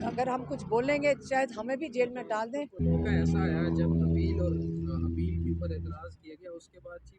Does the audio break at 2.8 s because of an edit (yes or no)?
yes